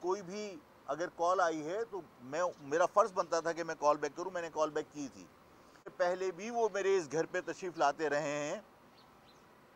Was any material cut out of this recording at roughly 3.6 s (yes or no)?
no